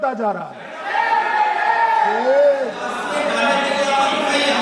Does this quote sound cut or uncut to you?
cut